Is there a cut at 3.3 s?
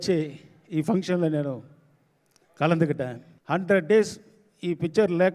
yes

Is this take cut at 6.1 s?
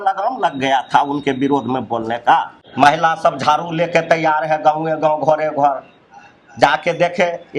no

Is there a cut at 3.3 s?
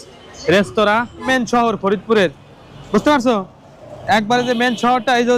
no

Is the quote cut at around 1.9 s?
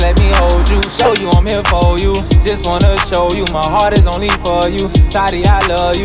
no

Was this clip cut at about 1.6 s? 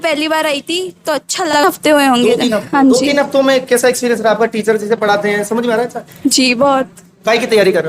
yes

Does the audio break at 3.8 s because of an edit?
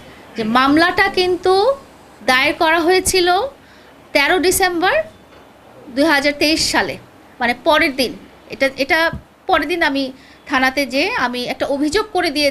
no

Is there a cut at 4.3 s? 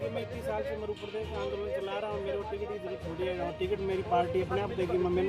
no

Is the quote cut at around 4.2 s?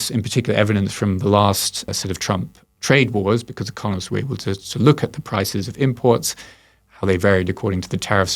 no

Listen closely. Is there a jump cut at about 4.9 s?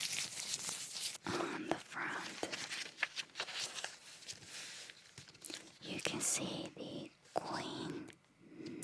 no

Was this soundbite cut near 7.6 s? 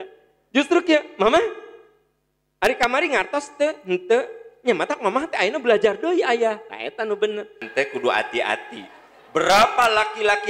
yes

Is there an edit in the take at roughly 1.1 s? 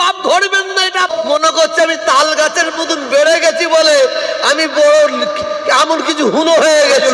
yes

